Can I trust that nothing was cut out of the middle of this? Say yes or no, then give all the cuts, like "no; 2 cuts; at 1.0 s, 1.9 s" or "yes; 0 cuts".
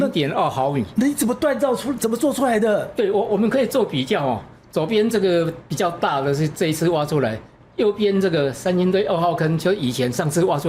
yes; 0 cuts